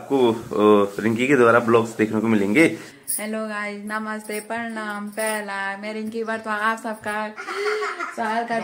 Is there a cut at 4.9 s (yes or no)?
no